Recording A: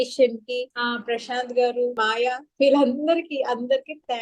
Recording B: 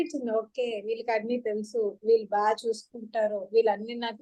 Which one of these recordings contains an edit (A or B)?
A